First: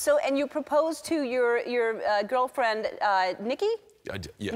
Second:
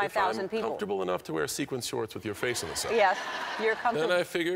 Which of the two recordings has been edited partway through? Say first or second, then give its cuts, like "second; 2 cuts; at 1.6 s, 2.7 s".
second; 1 cut; at 2.3 s